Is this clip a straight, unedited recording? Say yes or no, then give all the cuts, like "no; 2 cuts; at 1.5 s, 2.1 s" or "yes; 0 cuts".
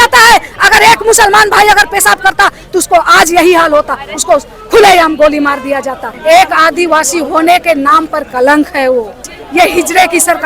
no; 2 cuts; at 6.1 s, 9.4 s